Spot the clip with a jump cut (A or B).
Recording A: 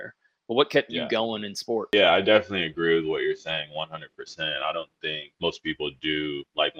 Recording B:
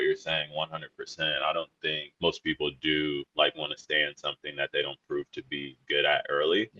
A